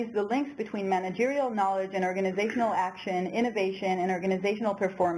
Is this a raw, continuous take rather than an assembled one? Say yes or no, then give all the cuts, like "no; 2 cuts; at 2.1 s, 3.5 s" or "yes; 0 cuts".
no; 1 cut; at 3.4 s